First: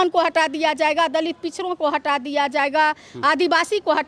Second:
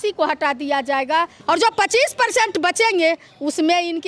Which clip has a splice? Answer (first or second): second